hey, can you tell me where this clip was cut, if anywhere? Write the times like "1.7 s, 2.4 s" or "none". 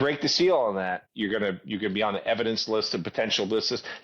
1.1 s